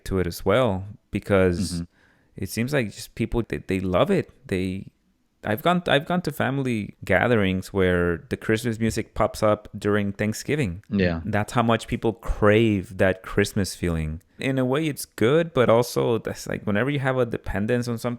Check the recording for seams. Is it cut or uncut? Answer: cut